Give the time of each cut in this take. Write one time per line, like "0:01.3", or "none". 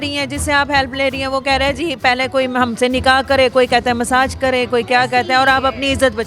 none